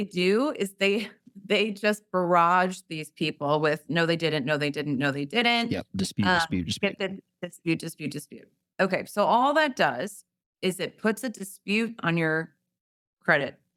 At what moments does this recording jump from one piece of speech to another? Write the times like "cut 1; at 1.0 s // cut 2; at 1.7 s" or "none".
none